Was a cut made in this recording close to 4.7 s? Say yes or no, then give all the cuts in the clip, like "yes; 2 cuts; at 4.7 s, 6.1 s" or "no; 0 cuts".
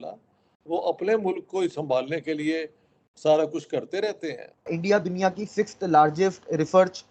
yes; 1 cut; at 4.7 s